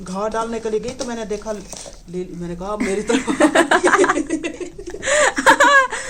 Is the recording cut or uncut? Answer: uncut